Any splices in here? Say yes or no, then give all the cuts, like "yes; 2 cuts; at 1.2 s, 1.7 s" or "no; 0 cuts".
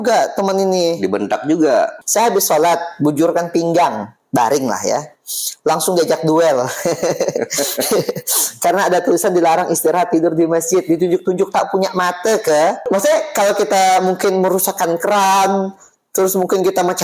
yes; 2 cuts; at 2.0 s, 12.8 s